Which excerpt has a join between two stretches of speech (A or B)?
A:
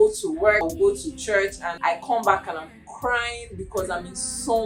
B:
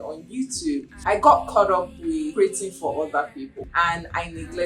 B